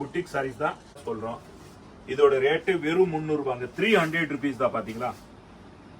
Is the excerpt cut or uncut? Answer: cut